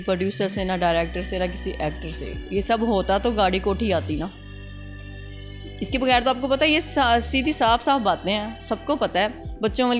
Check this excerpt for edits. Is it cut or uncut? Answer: uncut